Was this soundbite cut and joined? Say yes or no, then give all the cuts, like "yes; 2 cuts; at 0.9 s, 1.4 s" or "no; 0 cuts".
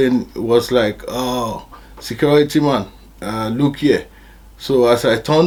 no; 0 cuts